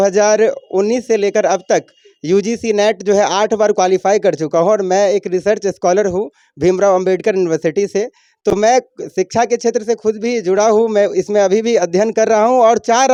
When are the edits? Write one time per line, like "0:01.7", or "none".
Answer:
none

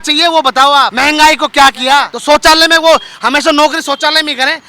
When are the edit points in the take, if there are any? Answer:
0:00.9
0:02.1

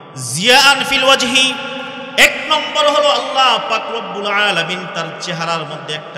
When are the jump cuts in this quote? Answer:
none

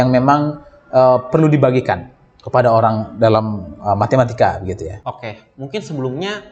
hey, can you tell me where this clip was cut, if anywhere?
0:05.0

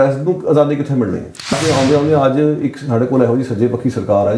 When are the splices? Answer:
0:01.5

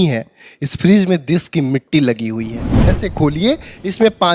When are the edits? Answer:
0:02.7

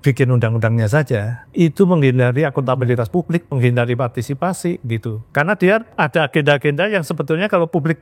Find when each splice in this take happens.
0:01.4
0:05.2
0:05.9

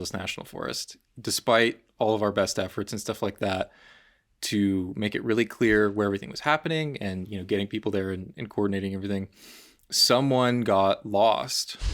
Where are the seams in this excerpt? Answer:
0:01.1

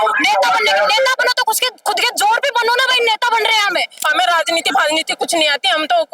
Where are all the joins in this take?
0:04.1

